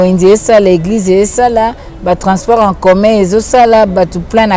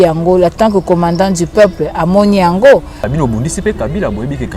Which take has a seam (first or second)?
second